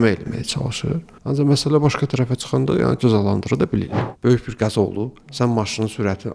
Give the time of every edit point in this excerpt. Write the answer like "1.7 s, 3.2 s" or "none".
1.1 s, 4.0 s